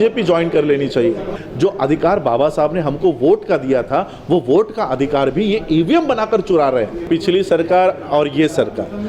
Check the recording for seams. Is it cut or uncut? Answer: cut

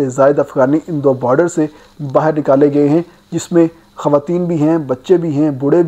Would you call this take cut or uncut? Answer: uncut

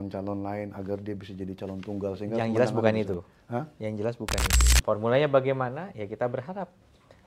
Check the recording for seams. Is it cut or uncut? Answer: cut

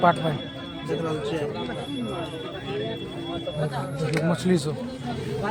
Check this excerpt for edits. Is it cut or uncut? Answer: uncut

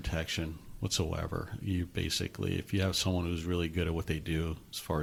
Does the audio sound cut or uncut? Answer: uncut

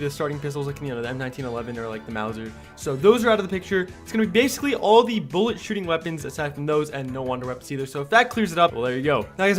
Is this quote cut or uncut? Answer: uncut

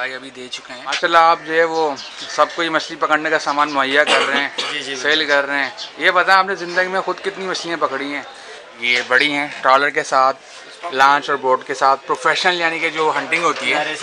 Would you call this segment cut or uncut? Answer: cut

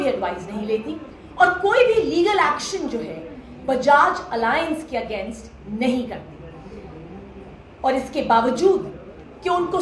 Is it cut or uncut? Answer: uncut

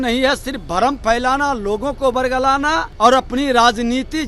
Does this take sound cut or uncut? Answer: cut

